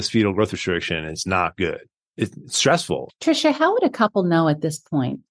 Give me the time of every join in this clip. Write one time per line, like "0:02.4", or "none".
0:02.0
0:03.1